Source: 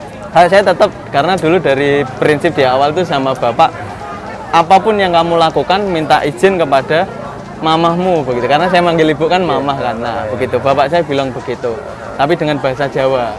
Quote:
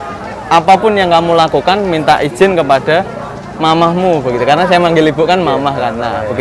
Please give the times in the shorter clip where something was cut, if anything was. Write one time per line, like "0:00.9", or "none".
none